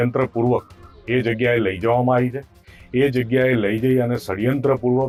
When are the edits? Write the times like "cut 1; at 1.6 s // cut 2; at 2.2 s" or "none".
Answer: none